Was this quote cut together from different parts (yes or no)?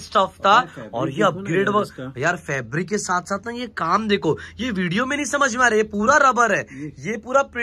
no